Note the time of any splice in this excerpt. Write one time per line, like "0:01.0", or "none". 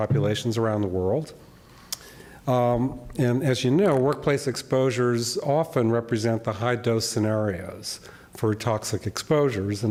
none